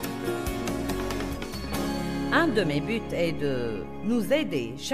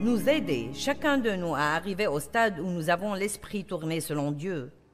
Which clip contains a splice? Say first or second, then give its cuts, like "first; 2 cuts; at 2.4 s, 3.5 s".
first; 1 cut; at 2.3 s